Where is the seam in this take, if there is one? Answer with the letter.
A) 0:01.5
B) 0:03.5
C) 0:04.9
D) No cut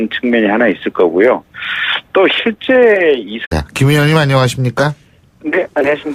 D